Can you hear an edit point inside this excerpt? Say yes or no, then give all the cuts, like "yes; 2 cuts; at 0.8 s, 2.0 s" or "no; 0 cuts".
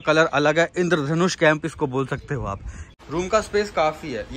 yes; 1 cut; at 2.8 s